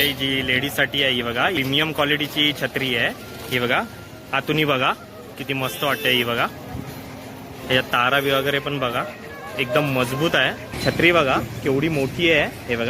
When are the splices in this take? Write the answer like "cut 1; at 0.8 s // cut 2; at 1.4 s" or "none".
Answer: cut 1; at 1.6 s // cut 2; at 10.7 s